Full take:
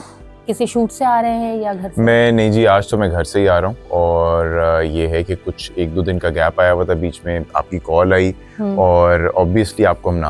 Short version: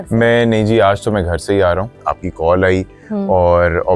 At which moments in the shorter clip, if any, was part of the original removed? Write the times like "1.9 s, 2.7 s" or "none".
1.9 s